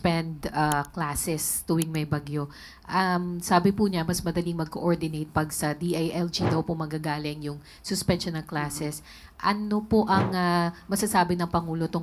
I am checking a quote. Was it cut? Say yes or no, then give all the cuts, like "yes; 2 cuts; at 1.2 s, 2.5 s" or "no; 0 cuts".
no; 0 cuts